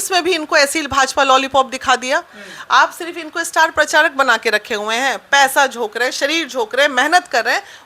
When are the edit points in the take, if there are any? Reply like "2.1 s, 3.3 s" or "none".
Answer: none